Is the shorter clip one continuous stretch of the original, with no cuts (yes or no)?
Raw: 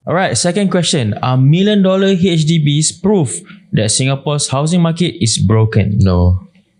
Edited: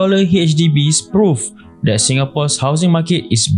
yes